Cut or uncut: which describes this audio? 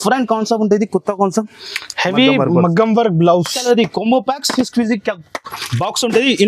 cut